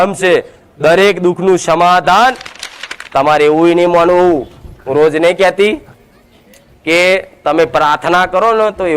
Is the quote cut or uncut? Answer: cut